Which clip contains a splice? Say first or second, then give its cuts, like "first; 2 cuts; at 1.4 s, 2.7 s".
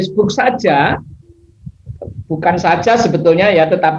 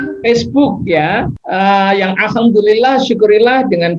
second; 1 cut; at 1.4 s